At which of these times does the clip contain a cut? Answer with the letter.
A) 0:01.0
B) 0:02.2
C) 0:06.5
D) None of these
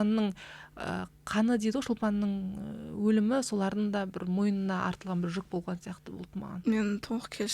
C